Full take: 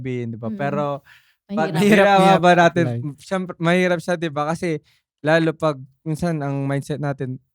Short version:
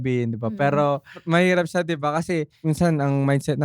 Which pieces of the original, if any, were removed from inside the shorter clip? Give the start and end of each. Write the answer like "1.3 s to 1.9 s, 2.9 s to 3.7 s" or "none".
1.1 s to 3.5 s, 4.9 s to 5.9 s